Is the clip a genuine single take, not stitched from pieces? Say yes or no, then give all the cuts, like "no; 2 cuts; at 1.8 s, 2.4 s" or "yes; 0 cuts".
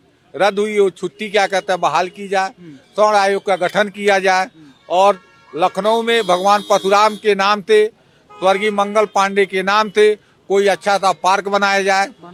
yes; 0 cuts